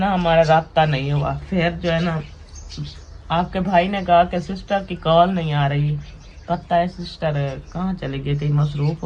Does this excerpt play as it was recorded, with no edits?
yes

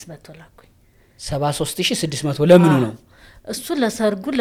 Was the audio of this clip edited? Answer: no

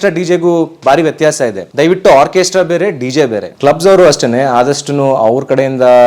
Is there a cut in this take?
yes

